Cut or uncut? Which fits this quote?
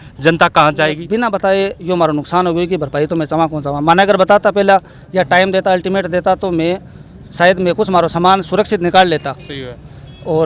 cut